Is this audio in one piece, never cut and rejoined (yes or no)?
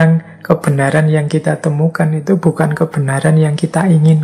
yes